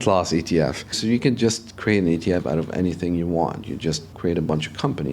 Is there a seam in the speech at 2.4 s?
no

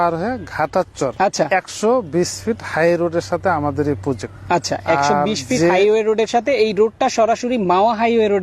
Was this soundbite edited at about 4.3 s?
yes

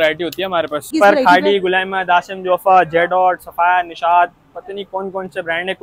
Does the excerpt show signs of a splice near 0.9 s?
yes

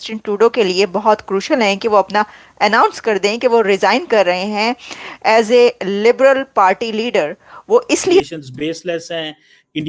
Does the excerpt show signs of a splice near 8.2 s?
yes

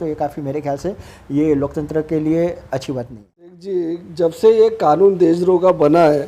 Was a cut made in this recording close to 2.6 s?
no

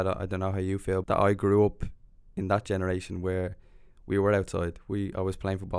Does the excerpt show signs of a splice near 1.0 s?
yes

